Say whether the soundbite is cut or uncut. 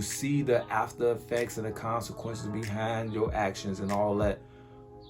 uncut